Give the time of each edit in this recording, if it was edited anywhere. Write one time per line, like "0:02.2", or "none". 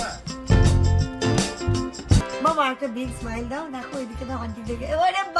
0:02.3